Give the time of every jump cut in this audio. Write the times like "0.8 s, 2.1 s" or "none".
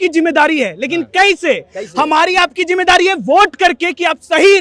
none